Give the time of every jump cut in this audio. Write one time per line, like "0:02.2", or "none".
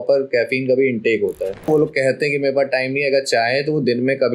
0:01.7